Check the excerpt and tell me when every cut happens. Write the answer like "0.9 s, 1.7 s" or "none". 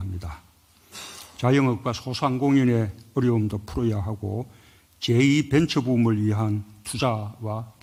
none